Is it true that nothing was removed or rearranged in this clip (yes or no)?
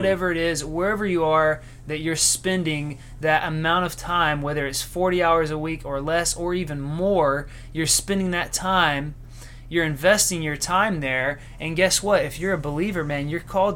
yes